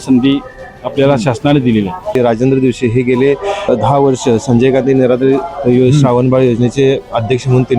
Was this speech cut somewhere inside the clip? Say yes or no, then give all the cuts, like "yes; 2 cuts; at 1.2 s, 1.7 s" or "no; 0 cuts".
yes; 2 cuts; at 2.2 s, 3.7 s